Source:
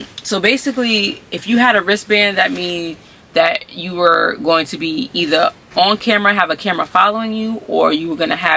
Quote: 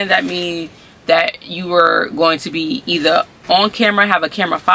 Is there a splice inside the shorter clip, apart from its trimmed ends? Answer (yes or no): no